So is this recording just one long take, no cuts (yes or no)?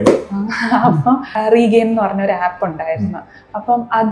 no